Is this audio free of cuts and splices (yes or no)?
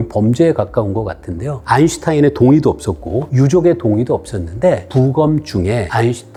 yes